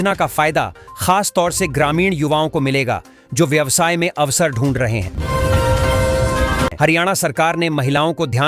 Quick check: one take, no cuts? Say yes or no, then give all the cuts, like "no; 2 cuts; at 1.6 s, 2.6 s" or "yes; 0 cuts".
no; 2 cuts; at 5.1 s, 6.7 s